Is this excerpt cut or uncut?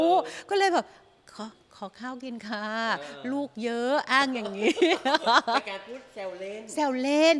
uncut